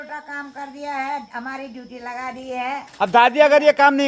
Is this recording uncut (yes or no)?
yes